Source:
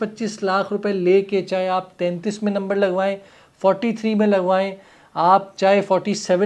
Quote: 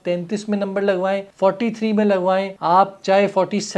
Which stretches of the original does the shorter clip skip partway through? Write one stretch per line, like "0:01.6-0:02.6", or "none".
0:03.2-0:03.5
0:04.8-0:05.1